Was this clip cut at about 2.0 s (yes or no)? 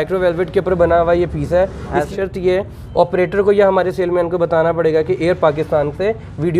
yes